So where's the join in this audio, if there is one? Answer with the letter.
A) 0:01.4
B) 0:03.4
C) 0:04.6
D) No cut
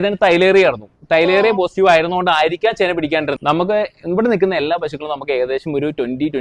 B